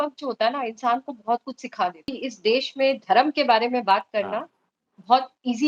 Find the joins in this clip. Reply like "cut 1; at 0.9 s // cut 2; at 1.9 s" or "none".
cut 1; at 2.1 s